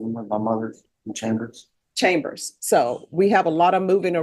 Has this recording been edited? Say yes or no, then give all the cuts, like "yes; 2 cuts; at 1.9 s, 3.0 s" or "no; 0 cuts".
no; 0 cuts